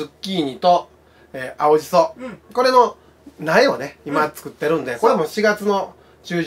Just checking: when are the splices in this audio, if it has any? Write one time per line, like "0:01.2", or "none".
none